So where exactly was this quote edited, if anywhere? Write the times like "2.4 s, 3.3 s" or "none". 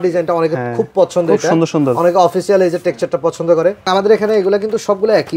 3.9 s